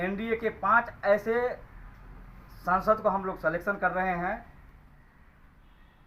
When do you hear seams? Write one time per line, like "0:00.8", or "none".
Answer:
none